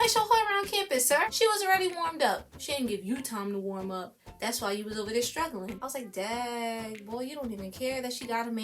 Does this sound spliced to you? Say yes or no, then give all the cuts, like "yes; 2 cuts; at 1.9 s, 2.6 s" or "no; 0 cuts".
yes; 2 cuts; at 1.3 s, 5.6 s